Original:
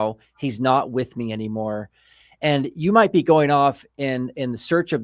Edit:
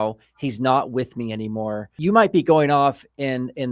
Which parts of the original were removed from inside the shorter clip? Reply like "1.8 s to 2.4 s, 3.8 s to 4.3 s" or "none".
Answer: 1.9 s to 2.7 s